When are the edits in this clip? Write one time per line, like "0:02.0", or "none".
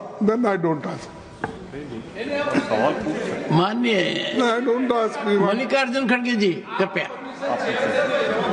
none

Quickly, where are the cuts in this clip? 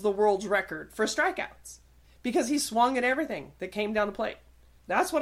none

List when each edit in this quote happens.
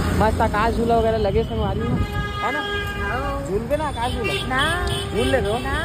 none

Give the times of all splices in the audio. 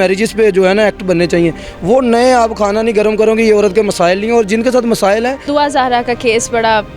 0:05.5

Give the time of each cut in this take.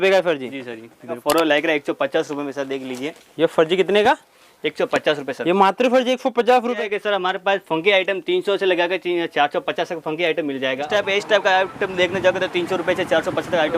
0:01.2
0:06.8
0:10.9

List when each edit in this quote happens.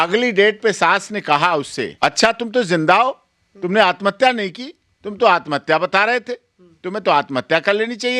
0:01.9

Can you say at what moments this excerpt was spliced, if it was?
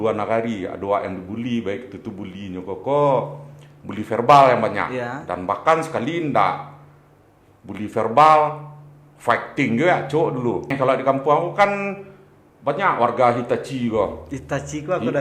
0:10.7

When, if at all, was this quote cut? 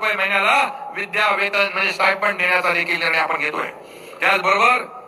none

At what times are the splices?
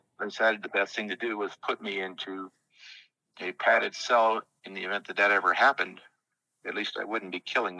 none

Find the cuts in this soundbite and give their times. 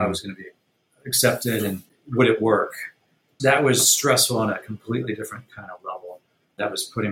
0:01.9
0:03.3

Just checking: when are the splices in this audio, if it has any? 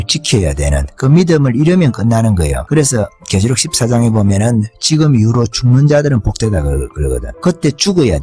0:02.6

